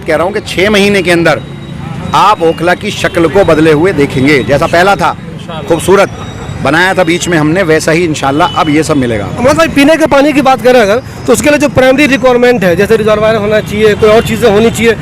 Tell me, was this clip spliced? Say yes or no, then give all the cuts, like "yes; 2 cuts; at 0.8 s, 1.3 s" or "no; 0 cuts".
no; 0 cuts